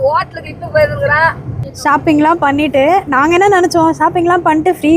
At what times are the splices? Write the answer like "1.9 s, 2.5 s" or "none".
1.6 s